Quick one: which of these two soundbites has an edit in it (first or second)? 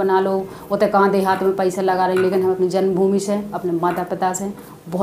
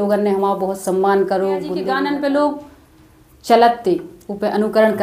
second